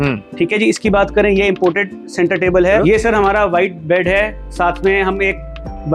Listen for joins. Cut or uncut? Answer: cut